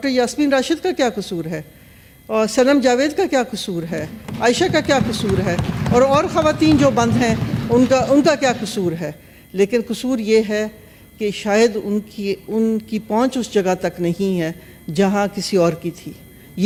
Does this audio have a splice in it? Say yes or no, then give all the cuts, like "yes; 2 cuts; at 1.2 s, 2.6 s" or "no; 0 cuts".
no; 0 cuts